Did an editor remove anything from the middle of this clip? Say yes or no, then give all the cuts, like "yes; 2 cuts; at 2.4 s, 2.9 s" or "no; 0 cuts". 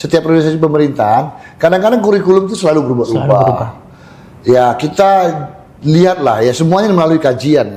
no; 0 cuts